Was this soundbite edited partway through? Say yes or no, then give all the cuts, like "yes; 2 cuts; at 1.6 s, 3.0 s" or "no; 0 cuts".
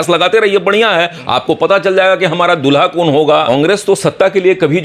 yes; 1 cut; at 3.5 s